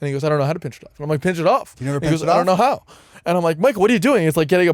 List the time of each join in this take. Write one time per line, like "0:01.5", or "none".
none

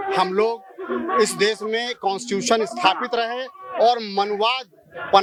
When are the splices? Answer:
none

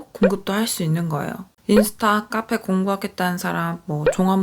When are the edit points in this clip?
0:01.5

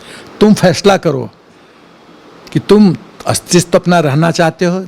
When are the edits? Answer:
none

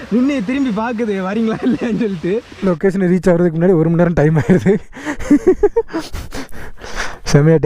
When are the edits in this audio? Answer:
0:02.5

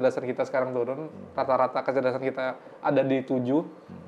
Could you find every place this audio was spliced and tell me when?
none

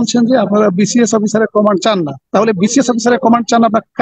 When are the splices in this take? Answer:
0:02.2

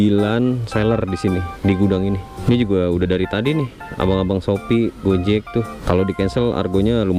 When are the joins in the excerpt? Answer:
0:02.3
0:05.8

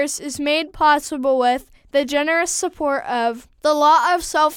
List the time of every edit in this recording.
0:03.5

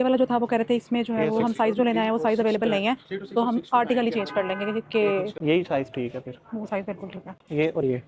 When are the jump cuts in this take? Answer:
0:05.3
0:07.2

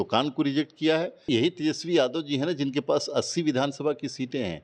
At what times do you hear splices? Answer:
0:01.3

